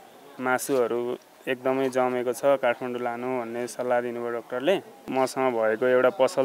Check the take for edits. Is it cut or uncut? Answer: cut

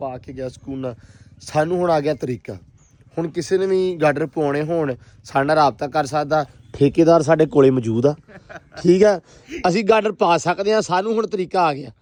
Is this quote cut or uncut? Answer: uncut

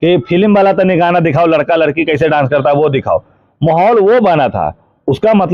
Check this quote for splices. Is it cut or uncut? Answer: uncut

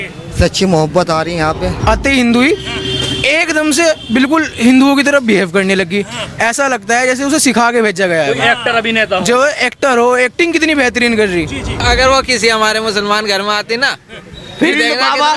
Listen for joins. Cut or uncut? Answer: cut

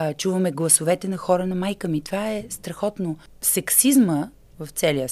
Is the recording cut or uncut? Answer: cut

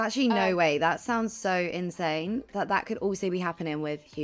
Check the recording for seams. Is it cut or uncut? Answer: cut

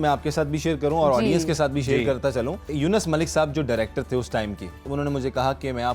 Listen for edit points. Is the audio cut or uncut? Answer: cut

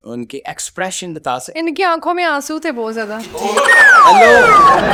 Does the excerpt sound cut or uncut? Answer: uncut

